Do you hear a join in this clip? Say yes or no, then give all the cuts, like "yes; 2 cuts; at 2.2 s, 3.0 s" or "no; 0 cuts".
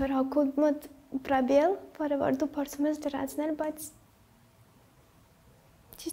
no; 0 cuts